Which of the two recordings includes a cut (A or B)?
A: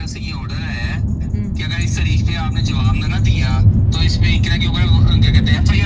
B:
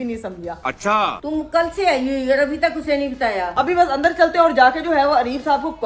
B